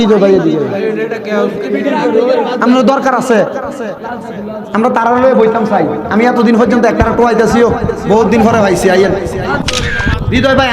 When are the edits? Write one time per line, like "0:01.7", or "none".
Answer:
0:09.6

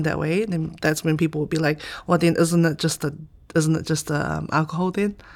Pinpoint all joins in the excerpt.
none

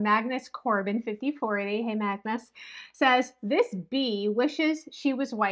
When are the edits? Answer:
none

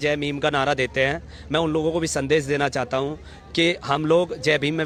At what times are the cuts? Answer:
none

